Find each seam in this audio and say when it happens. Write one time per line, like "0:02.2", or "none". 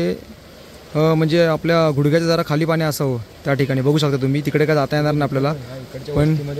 none